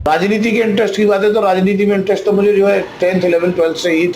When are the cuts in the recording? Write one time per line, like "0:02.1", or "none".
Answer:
0:01.5